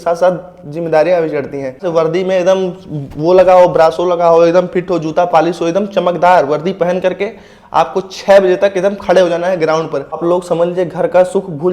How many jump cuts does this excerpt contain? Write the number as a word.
two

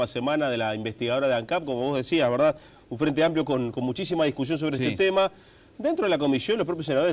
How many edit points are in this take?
zero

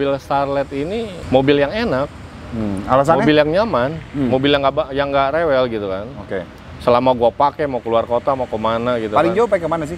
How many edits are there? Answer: one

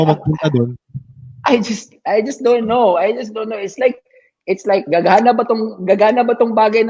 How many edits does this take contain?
one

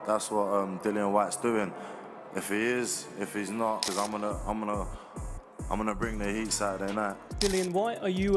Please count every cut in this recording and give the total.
one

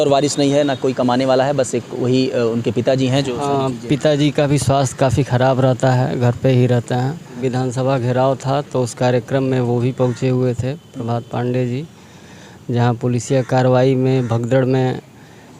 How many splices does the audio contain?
one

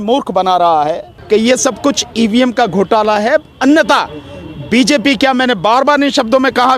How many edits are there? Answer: one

